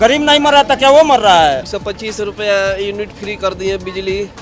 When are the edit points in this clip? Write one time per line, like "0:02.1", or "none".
0:01.8